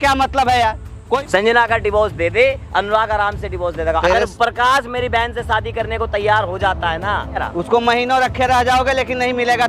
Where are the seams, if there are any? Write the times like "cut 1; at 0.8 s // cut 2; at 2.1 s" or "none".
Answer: cut 1; at 1.2 s // cut 2; at 4.0 s // cut 3; at 7.4 s